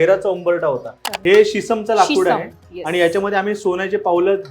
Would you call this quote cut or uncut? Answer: cut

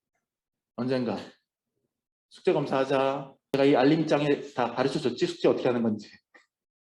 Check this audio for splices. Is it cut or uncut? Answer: cut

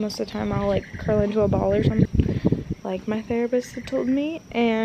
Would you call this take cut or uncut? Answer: cut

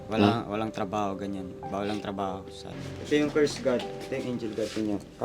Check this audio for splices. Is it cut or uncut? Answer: cut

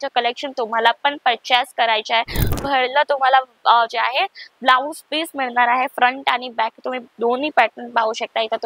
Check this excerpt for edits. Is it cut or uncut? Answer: cut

